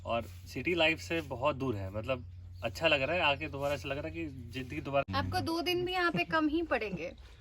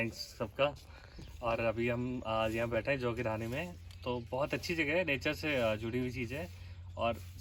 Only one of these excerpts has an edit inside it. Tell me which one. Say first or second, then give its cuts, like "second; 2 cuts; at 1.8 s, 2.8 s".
first; 1 cut; at 5.1 s